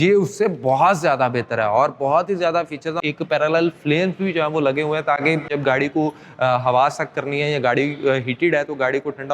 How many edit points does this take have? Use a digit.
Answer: 2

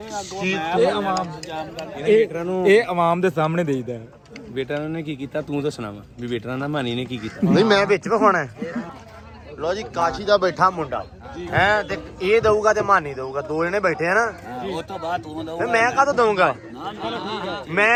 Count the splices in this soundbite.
0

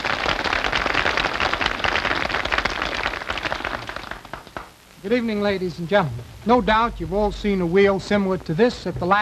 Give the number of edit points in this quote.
1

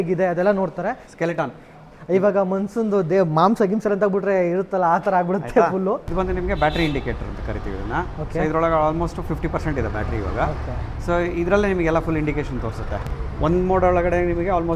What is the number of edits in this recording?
3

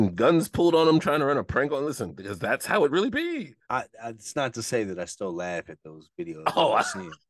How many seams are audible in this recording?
1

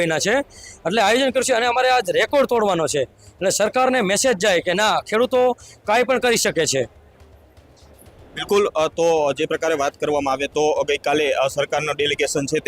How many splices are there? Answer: 0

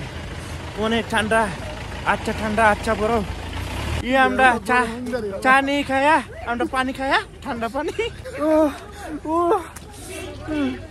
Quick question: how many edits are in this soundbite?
1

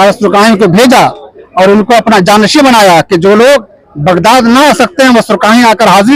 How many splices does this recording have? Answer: 0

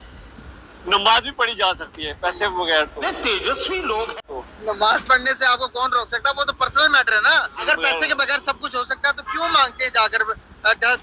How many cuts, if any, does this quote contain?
3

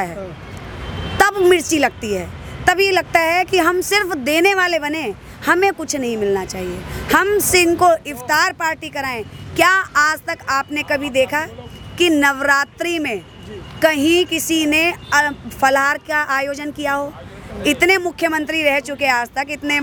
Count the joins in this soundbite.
0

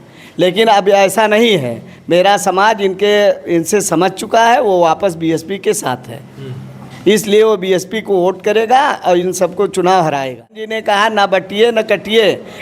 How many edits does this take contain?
1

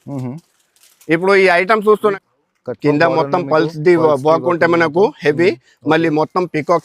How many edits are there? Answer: 1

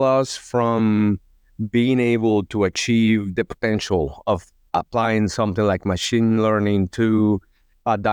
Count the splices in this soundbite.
0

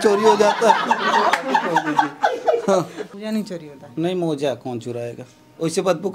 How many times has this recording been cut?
1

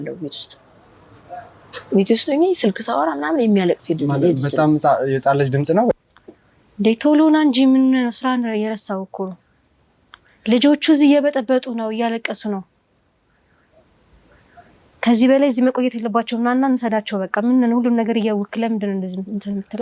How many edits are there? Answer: 1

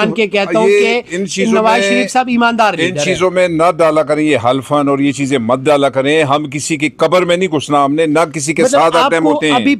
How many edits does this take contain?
0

